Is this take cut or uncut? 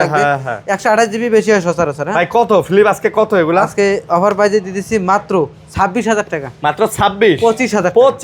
uncut